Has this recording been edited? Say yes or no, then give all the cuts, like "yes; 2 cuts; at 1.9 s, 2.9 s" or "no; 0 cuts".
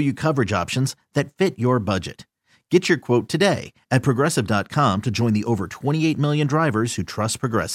no; 0 cuts